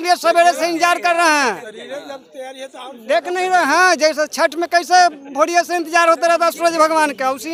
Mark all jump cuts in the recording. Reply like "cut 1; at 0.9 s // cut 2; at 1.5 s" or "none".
none